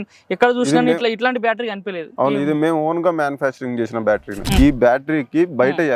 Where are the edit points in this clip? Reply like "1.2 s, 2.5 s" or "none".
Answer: 4.6 s